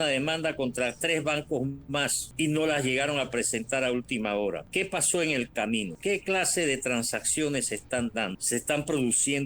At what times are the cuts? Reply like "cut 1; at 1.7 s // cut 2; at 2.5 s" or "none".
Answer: cut 1; at 2.2 s // cut 2; at 4.6 s // cut 3; at 5.9 s // cut 4; at 8.4 s